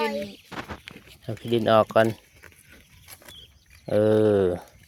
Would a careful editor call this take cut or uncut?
uncut